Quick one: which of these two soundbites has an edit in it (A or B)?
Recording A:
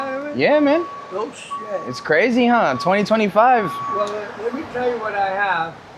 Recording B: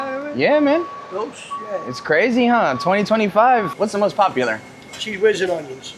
B